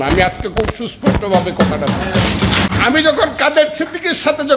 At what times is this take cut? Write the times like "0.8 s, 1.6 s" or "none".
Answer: 2.7 s